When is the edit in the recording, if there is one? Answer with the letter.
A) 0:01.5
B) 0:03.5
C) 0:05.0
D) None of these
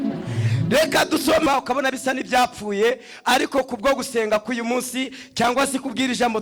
A